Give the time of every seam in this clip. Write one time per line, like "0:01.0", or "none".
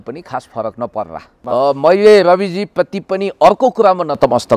0:01.4

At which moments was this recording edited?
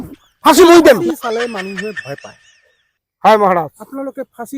0:01.0

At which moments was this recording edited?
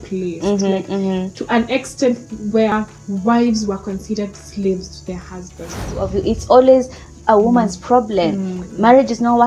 0:02.7
0:06.0

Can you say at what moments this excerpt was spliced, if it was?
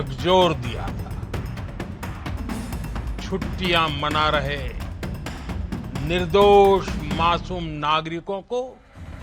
0:01.2
0:03.3

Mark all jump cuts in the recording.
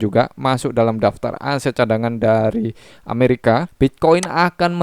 0:03.7

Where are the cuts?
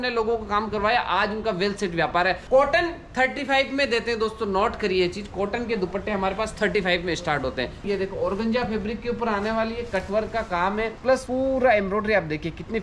0:02.4
0:07.9
0:11.2

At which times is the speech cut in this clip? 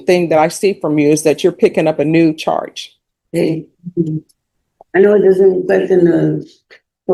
none

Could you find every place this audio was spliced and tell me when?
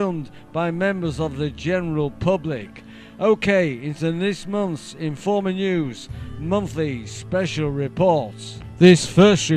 0:01.8

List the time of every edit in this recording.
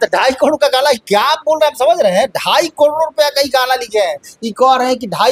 none

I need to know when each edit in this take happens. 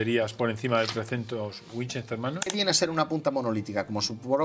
0:02.5

